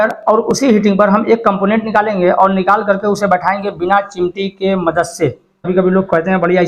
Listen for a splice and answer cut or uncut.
cut